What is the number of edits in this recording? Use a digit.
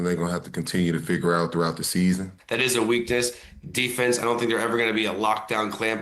1